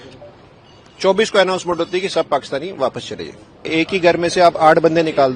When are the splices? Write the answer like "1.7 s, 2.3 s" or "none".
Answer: 3.7 s